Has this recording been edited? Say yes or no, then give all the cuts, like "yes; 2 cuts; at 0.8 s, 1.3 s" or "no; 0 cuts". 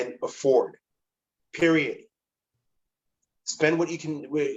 no; 0 cuts